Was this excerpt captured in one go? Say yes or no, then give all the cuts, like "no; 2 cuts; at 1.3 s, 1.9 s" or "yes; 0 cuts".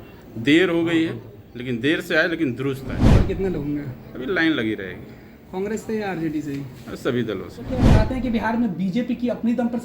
no; 2 cuts; at 3.1 s, 7.9 s